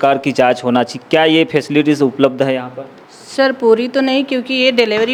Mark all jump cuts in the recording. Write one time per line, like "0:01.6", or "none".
none